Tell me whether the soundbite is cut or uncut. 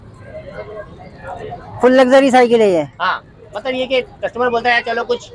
uncut